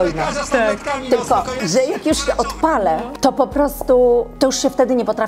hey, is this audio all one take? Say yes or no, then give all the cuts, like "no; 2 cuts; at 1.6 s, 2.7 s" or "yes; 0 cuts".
no; 3 cuts; at 1.6 s, 3.1 s, 4.3 s